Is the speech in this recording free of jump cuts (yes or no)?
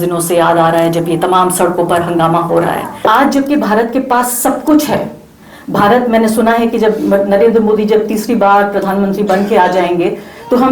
no